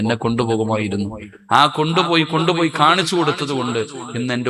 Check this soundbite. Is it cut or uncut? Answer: uncut